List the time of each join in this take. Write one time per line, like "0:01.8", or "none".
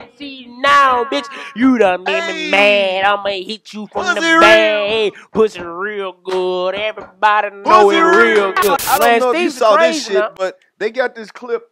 0:08.8